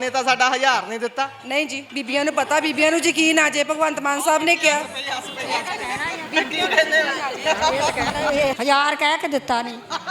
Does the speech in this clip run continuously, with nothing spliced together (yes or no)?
no